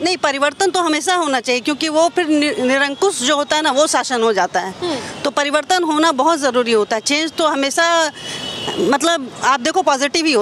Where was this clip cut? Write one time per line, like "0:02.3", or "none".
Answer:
none